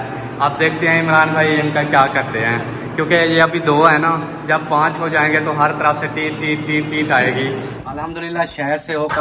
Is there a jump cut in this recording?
yes; 1 cut; at 7.8 s

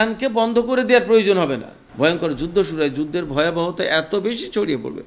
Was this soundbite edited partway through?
yes; 1 cut; at 1.8 s

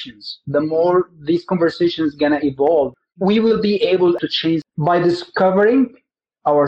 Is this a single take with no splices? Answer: no; 2 cuts; at 2.9 s, 4.2 s

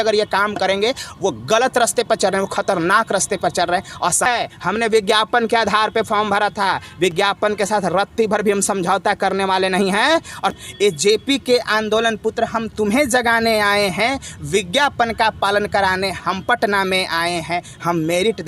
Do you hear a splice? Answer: yes; 2 cuts; at 4.3 s, 10.5 s

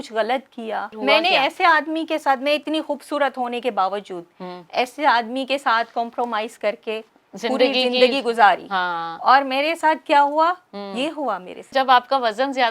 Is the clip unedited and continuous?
no; 2 cuts; at 1.0 s, 11.7 s

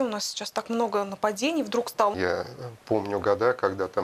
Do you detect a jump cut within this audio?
yes; 1 cut; at 2.1 s

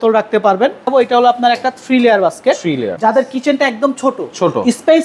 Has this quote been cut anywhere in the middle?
yes; 2 cuts; at 0.8 s, 2.9 s

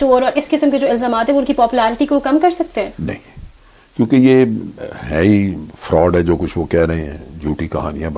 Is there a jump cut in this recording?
no; 0 cuts

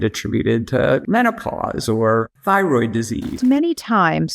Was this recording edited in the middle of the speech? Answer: yes; 3 cuts; at 1.0 s, 2.3 s, 3.4 s

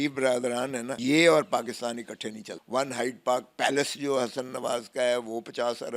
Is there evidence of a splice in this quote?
yes; 2 cuts; at 0.9 s, 2.5 s

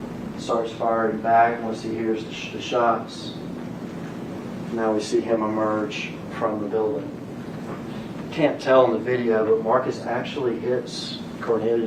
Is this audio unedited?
yes; 0 cuts

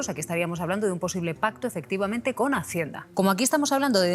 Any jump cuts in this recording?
yes; 1 cut; at 3.0 s

